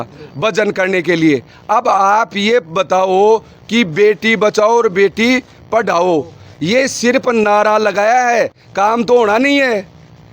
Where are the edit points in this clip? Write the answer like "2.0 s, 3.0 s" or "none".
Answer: none